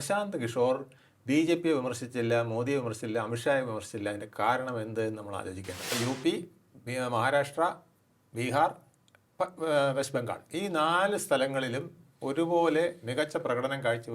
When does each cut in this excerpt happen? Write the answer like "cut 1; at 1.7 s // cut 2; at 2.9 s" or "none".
cut 1; at 5.9 s